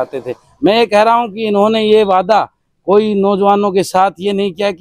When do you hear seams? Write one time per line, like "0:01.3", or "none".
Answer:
none